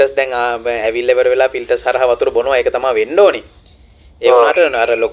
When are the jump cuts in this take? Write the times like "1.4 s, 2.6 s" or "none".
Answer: none